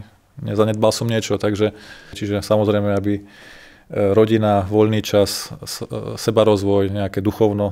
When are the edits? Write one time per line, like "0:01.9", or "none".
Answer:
0:02.2